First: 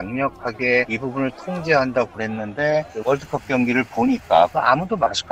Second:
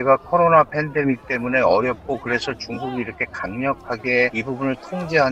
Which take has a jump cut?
first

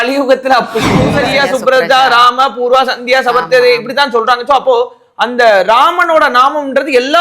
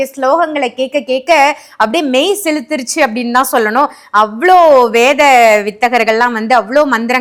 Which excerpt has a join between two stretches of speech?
first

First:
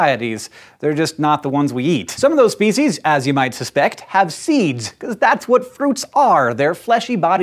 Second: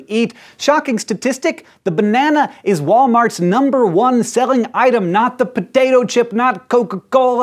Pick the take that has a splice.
second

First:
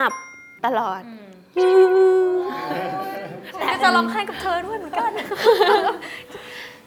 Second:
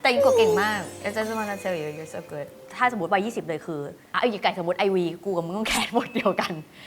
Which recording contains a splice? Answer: second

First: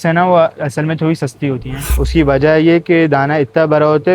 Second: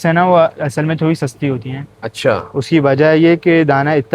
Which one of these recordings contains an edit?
first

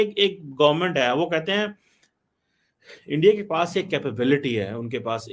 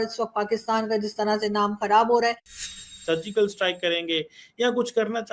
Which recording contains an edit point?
second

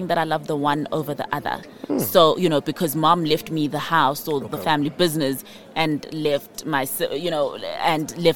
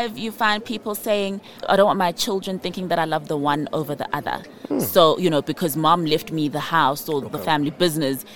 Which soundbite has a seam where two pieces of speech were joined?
second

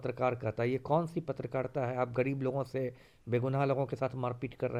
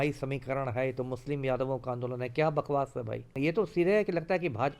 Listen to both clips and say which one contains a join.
second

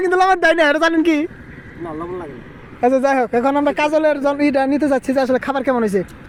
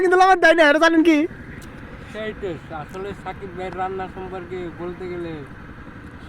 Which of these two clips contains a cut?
second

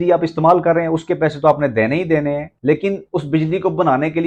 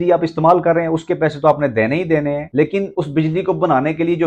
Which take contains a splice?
second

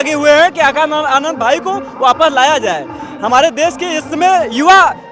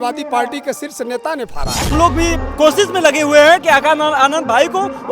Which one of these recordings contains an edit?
second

